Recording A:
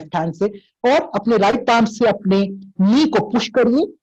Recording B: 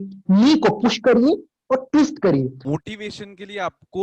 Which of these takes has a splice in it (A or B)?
B